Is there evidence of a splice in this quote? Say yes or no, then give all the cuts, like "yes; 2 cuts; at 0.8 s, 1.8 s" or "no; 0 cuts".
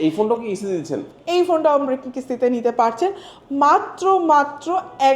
no; 0 cuts